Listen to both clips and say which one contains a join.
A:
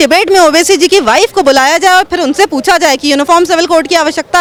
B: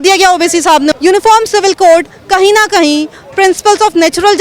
B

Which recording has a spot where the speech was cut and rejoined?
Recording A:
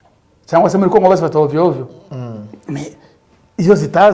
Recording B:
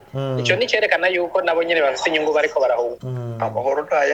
B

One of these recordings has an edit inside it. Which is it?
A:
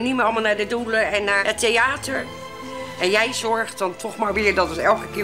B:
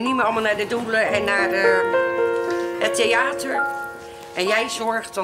A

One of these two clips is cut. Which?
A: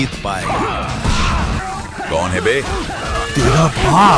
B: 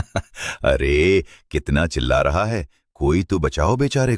A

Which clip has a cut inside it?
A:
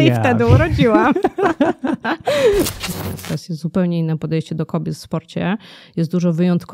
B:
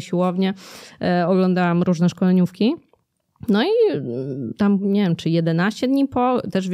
A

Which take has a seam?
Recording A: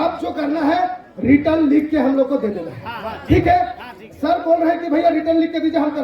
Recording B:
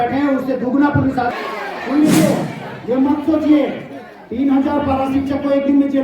B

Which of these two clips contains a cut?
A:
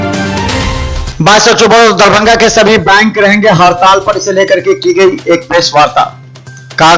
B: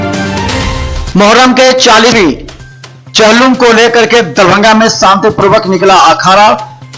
B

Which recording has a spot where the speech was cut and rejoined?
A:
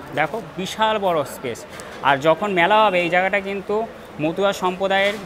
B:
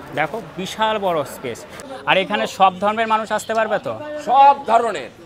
B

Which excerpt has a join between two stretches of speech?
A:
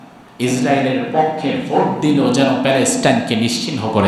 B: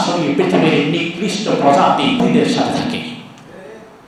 B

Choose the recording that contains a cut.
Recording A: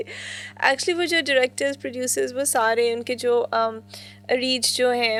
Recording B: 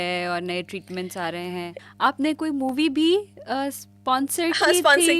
B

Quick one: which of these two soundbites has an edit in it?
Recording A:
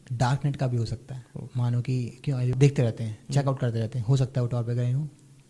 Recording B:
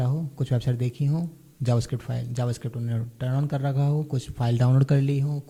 A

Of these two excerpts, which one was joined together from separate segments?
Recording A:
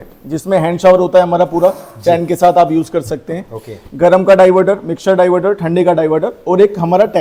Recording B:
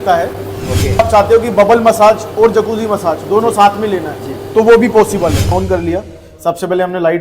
B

